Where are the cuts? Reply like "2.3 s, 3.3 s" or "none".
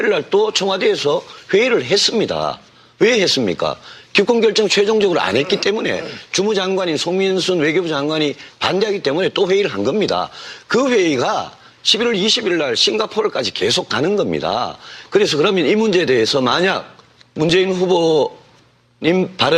16.4 s